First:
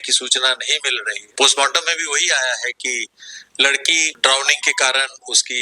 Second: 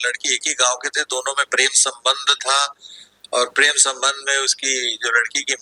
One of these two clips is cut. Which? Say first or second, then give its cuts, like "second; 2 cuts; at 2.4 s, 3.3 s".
first; 2 cuts; at 1.2 s, 4.1 s